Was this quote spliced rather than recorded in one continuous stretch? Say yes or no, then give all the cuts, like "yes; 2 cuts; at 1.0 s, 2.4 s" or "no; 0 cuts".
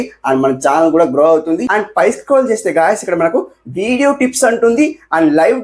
yes; 1 cut; at 1.7 s